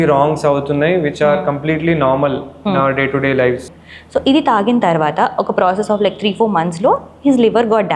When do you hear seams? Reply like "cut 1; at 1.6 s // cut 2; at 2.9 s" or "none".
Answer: cut 1; at 3.6 s